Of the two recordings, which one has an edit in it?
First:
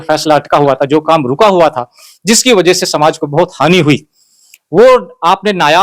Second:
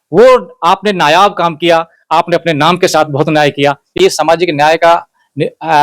second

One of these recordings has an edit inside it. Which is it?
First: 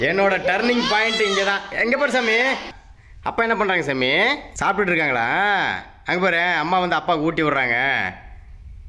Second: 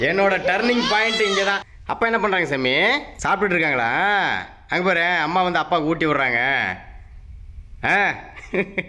second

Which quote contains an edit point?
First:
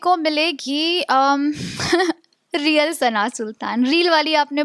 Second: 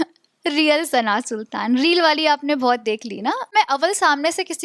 second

